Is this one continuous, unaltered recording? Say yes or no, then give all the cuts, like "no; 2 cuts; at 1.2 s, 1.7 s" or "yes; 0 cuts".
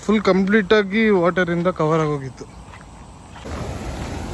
no; 1 cut; at 3.4 s